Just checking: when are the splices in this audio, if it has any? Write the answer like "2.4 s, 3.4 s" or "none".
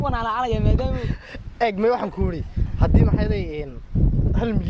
none